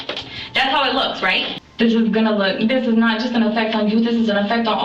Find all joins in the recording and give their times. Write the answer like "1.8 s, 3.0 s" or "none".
1.5 s